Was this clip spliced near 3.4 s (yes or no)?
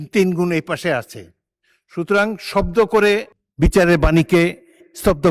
yes